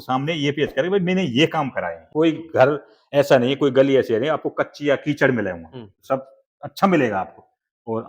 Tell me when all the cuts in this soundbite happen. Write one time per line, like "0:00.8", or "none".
0:02.0